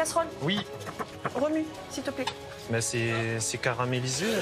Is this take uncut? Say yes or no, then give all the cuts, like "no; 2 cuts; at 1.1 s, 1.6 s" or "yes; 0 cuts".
no; 1 cut; at 2.5 s